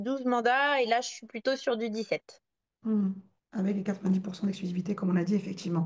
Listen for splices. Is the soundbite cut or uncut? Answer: uncut